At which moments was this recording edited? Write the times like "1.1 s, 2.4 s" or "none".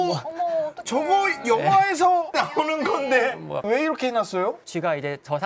3.6 s

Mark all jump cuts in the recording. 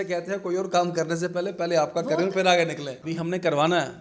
2.9 s

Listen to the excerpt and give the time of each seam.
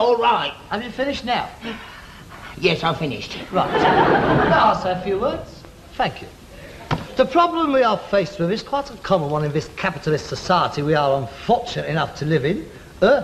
3.4 s

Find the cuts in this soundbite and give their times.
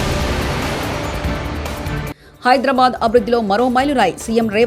2.2 s

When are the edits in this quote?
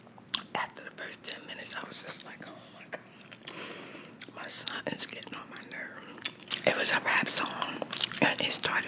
6.5 s

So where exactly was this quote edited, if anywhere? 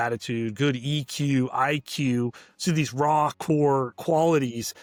none

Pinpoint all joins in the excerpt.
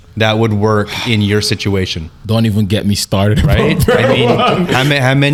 none

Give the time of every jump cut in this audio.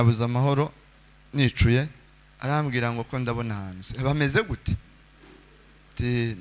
2.0 s

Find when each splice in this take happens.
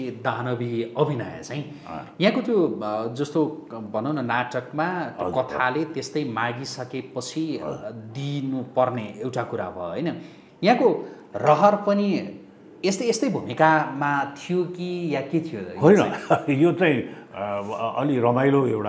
none

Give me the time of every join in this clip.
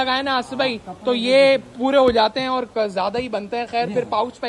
none

